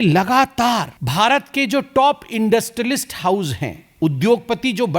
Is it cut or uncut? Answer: cut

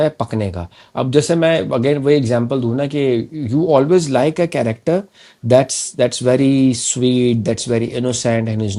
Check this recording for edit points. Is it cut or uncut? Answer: uncut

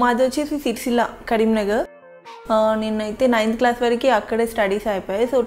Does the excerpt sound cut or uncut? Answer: cut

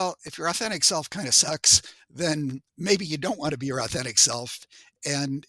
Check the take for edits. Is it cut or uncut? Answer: cut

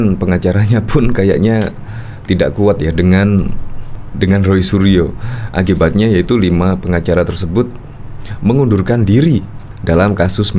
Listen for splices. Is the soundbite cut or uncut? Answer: uncut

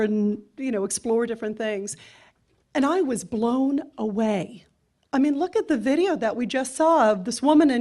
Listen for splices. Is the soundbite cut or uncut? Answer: uncut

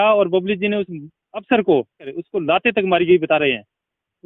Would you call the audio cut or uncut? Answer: cut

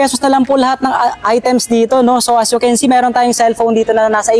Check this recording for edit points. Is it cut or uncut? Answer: uncut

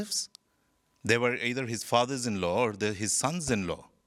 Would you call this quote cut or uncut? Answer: uncut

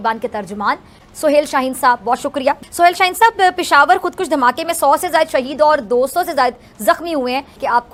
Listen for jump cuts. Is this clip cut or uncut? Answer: uncut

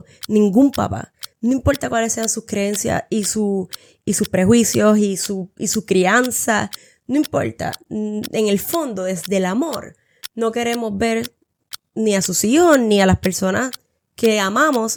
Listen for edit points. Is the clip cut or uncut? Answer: uncut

